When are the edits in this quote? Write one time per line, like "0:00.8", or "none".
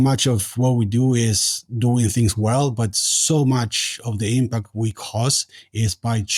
none